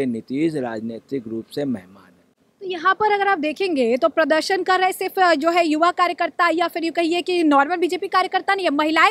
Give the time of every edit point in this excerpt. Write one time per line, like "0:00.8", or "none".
none